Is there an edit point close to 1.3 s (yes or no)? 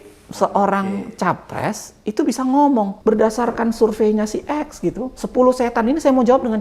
no